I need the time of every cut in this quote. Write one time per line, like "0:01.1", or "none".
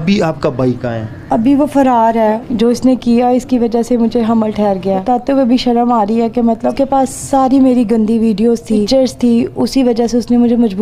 0:01.1
0:02.4
0:05.0
0:07.0
0:08.9

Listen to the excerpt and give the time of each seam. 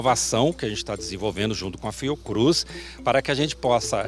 none

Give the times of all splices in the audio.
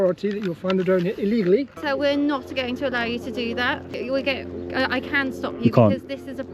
0:01.8
0:03.9

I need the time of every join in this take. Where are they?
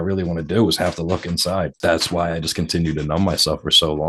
0:01.7

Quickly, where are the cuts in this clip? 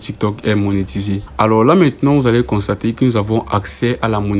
0:01.2

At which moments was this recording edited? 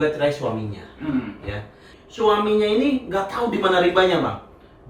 0:01.9

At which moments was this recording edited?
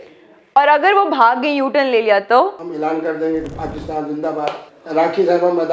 0:02.6
0:04.7

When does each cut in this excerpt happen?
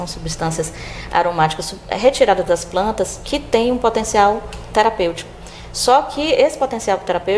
0:05.3

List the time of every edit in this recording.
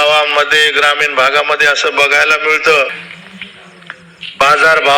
0:02.9

